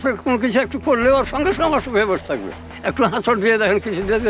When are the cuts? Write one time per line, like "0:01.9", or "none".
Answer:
0:02.8